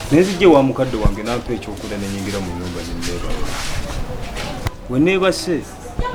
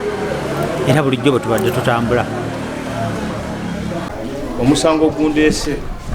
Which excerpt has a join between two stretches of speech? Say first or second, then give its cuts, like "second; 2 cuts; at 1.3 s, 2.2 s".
second; 1 cut; at 4.3 s